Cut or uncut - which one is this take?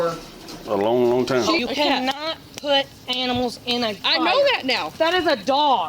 cut